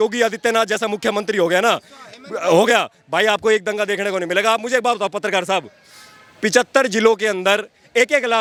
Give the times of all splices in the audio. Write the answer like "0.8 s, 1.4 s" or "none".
none